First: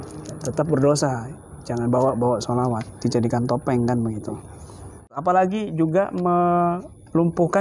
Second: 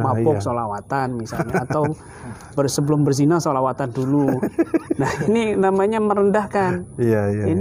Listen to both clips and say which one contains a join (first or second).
first